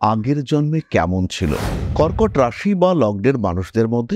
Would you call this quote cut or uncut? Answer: cut